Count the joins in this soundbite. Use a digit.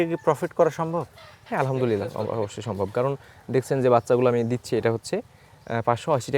0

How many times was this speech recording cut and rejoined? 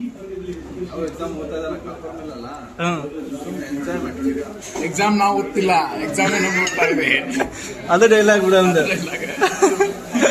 0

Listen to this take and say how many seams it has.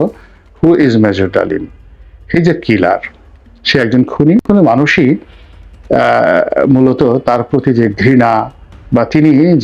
1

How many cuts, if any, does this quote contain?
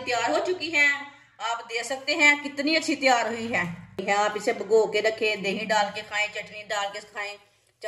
1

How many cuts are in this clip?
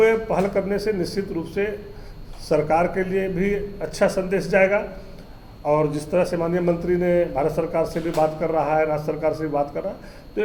0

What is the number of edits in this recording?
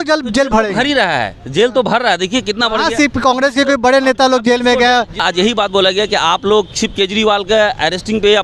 1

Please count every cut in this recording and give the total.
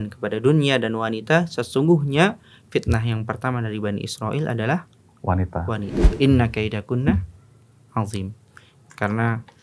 1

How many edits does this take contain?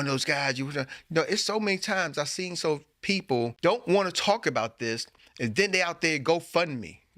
1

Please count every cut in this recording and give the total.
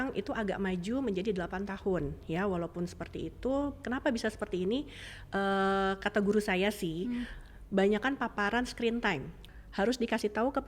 1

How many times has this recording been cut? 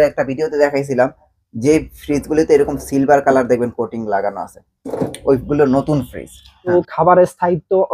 1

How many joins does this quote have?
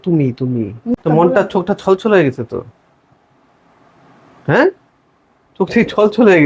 1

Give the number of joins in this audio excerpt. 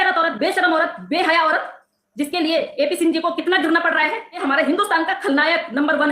1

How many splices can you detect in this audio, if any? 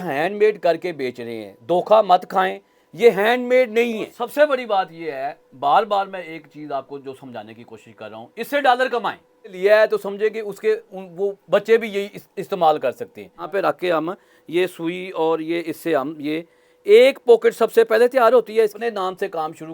4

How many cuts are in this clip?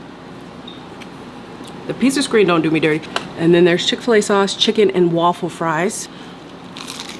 2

